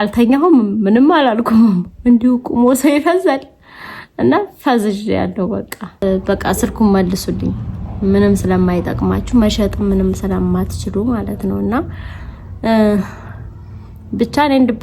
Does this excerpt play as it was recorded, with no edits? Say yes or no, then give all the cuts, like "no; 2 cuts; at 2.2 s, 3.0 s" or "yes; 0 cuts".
no; 1 cut; at 5.8 s